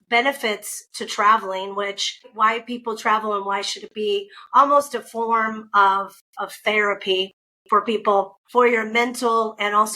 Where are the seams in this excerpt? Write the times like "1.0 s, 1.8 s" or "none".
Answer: 2.2 s, 8.4 s

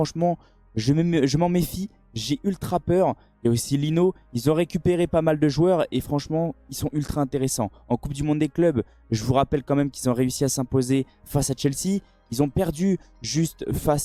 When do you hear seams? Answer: none

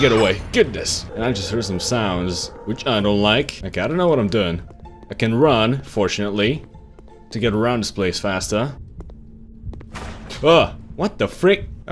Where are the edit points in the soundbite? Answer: 0.9 s

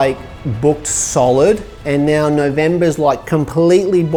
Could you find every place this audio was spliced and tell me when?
none

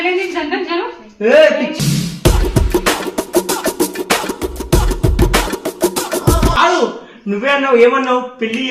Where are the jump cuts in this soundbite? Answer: 1.7 s, 6.6 s

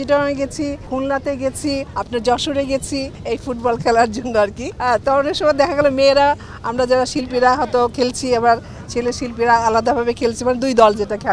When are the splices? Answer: 0.8 s, 1.9 s, 3.1 s, 4.7 s

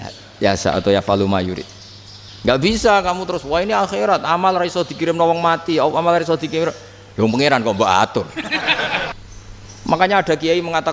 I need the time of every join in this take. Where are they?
9.1 s

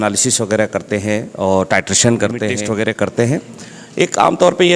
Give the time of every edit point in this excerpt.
2.6 s

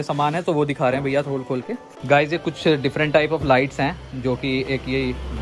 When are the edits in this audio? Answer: 2.0 s

